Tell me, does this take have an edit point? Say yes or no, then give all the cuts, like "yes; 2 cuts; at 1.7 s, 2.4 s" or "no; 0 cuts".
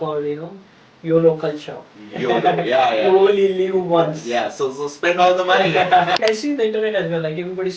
yes; 1 cut; at 6.2 s